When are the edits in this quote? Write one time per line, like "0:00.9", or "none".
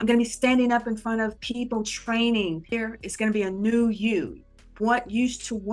0:02.7